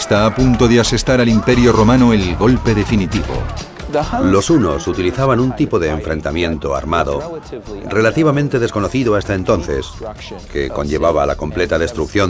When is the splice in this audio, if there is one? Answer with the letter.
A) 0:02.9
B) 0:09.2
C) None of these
B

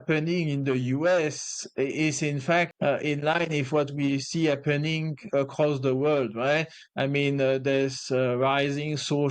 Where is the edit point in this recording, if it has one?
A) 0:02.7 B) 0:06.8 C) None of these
A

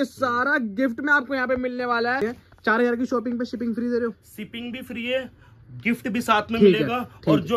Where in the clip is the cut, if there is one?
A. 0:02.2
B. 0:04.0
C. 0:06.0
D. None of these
A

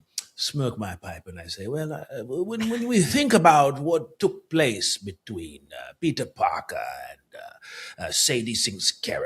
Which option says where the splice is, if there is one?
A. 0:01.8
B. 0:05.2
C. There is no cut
C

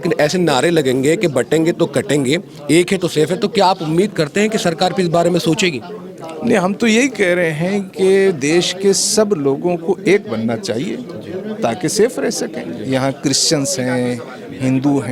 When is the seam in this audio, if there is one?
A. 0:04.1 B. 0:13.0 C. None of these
C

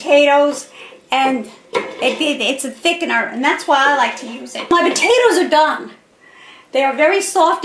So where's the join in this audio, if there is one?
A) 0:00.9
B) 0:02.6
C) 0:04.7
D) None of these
C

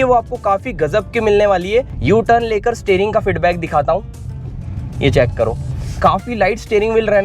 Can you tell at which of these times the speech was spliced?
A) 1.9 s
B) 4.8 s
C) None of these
A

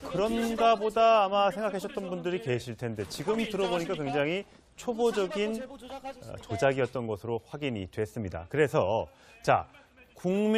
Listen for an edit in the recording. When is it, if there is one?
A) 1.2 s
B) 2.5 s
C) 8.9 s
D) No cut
D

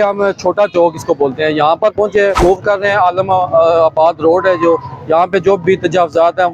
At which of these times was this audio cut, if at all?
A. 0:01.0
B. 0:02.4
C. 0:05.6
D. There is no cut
B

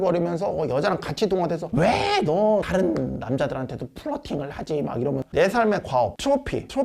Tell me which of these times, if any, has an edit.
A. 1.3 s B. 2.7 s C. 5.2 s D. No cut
C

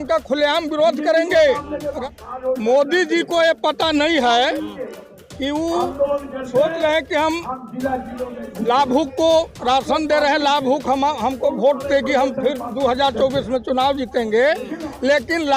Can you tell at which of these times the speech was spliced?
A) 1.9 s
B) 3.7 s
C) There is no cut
A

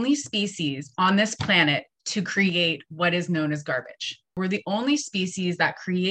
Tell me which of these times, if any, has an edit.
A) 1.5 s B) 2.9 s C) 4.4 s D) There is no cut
C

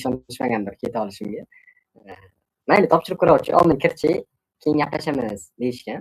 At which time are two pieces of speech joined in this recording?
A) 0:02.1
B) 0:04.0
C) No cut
B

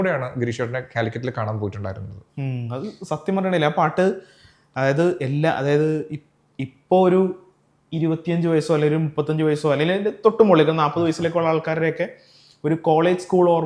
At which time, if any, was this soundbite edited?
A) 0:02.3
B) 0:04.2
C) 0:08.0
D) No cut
D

